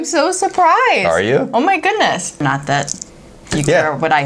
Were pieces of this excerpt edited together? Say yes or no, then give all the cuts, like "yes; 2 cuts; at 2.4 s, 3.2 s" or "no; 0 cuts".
yes; 1 cut; at 2.4 s